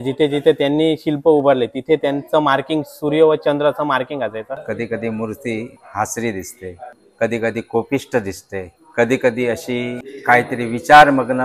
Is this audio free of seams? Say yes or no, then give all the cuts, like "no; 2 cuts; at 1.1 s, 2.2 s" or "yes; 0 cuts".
no; 1 cut; at 4.6 s